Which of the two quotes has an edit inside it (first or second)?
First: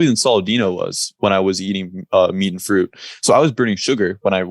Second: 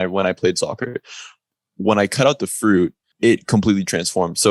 second